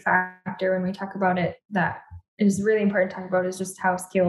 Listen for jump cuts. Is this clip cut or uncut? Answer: uncut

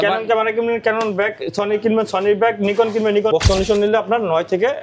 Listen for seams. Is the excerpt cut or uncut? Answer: cut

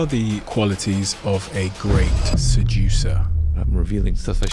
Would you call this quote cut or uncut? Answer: uncut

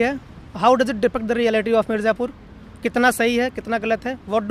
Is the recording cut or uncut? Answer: uncut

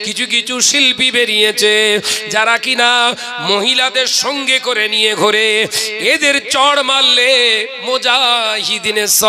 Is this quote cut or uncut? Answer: uncut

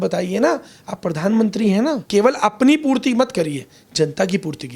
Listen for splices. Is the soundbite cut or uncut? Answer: cut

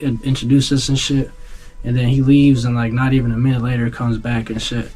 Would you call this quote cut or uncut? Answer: uncut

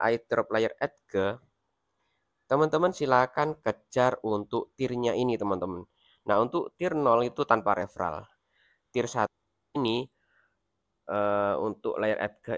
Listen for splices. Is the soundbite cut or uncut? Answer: cut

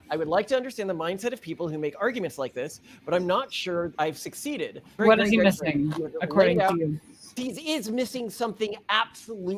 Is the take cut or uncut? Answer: cut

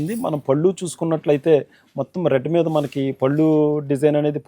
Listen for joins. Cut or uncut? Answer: uncut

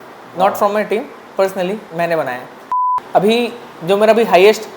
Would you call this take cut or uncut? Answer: cut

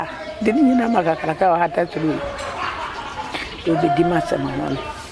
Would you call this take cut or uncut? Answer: uncut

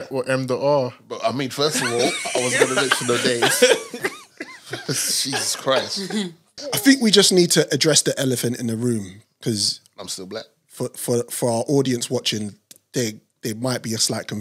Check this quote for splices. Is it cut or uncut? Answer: cut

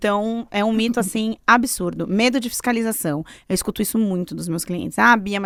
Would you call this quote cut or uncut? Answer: uncut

